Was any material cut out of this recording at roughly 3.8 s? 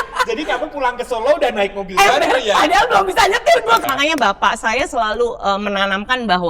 yes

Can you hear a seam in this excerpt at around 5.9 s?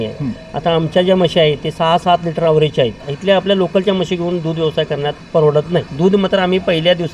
yes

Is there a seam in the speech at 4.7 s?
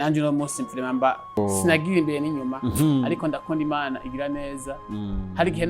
no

